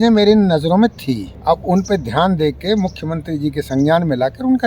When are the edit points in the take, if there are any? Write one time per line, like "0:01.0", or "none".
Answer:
0:01.3